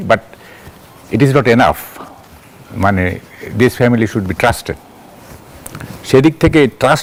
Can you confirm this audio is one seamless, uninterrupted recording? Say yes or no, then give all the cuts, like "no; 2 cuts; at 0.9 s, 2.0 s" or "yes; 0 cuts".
yes; 0 cuts